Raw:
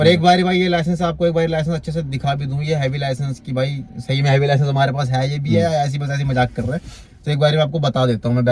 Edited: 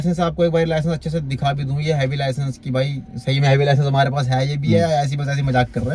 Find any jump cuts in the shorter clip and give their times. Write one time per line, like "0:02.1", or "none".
none

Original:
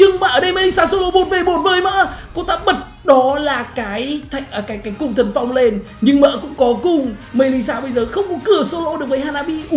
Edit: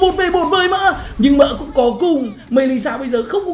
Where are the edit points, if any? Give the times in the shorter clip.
0:01.1

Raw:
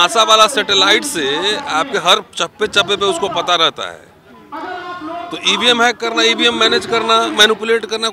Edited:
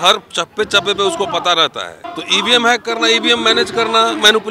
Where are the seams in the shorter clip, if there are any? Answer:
0:02.1

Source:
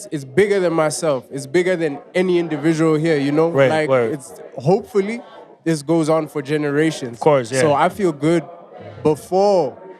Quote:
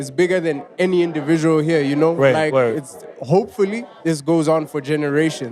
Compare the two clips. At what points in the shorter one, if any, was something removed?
0:03.9

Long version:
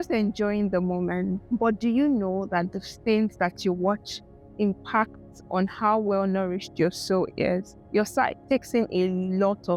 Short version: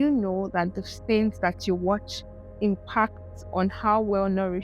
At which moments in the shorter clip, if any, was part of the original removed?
none

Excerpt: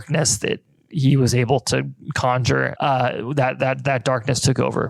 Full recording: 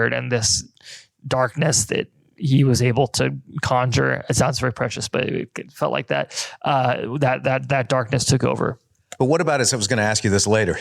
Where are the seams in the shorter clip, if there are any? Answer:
0:02.7

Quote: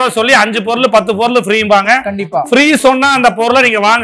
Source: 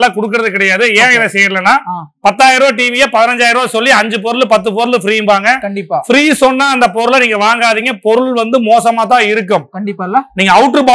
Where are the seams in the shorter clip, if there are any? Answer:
none

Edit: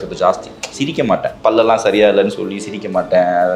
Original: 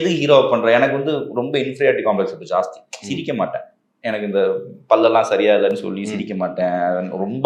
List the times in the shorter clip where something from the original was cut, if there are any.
0:01.4

